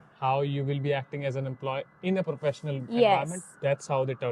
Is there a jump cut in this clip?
no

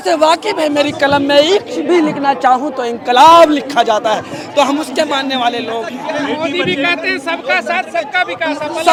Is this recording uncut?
yes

